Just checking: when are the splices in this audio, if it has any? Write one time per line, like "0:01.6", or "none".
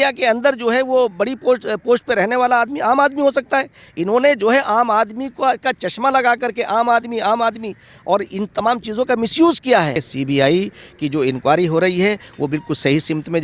0:10.0